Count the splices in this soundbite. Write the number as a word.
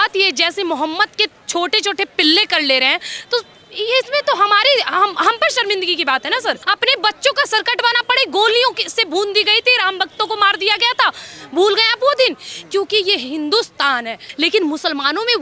two